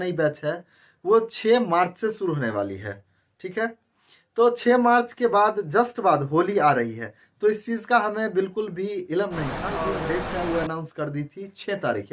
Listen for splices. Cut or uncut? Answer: cut